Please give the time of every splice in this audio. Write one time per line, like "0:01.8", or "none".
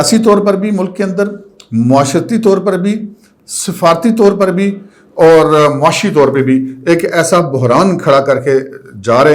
none

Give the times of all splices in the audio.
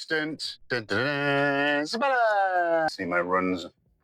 0:02.9

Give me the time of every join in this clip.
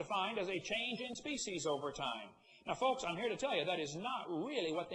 none

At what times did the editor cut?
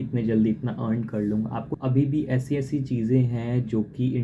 0:01.7

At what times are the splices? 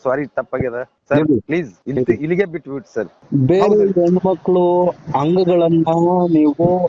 0:00.9
0:01.8
0:03.2

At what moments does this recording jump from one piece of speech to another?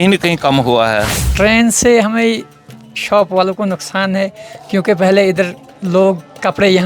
0:01.2

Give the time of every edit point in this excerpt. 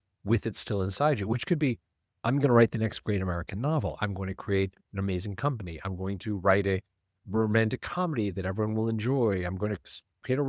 0:07.2

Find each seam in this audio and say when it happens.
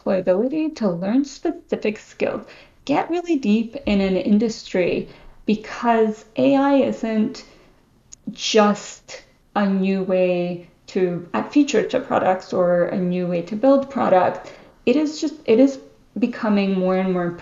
none

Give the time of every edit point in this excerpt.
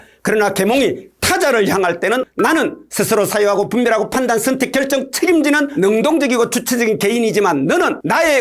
0:02.3

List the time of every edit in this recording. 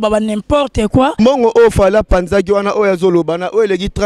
0:01.1

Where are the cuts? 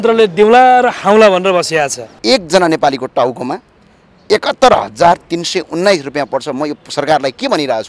0:02.1

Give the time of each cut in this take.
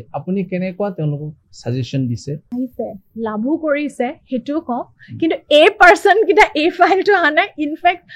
0:02.4

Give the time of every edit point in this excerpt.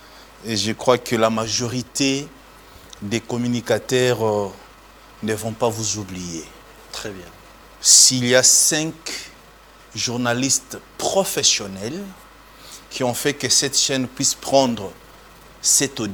none

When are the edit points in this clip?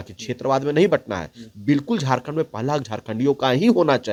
none

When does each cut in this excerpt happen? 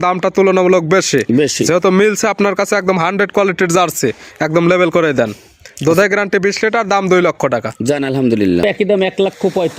0:08.6

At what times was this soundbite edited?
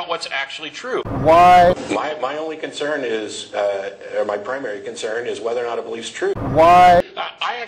none

